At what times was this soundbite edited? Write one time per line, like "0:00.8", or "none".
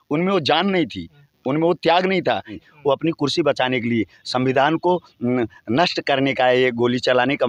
0:02.7